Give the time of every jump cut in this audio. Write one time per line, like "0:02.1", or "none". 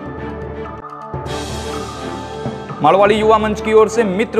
0:00.8
0:02.4